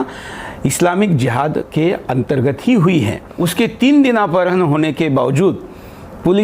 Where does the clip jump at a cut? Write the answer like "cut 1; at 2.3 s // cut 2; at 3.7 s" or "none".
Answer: cut 1; at 3.2 s